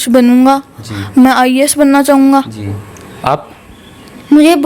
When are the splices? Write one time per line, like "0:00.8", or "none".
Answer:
none